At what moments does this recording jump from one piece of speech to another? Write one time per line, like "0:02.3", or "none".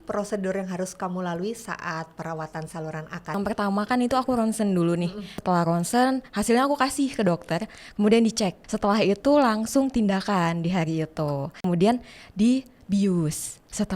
0:03.4
0:05.3
0:08.6
0:11.6